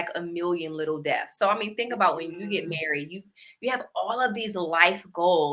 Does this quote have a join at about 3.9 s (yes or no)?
no